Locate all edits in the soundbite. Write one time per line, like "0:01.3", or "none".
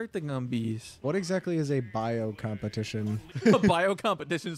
0:01.0
0:03.3